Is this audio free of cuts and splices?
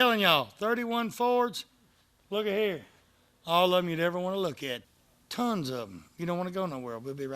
no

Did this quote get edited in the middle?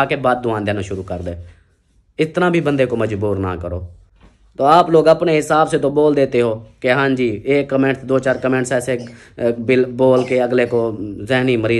no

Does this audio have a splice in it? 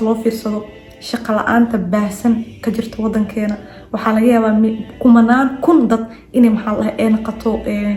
no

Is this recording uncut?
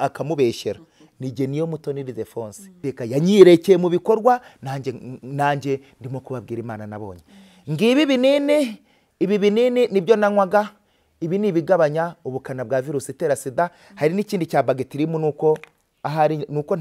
no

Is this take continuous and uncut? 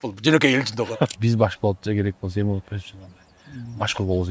no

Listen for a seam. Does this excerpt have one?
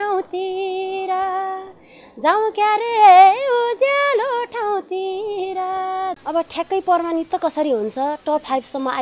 yes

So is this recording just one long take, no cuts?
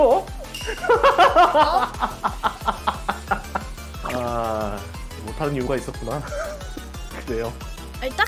yes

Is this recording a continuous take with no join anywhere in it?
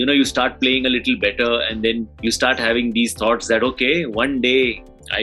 no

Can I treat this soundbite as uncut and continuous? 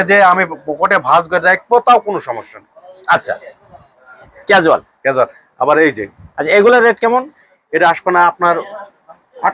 yes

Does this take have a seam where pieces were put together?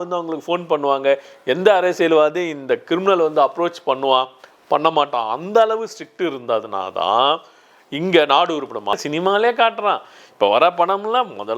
yes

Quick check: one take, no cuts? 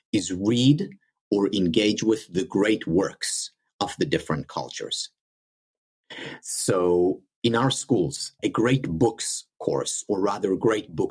no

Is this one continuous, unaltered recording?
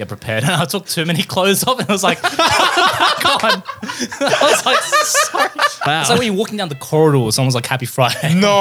no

